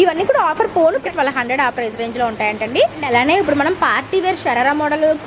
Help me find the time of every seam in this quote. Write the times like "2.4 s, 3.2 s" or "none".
1.0 s, 3.1 s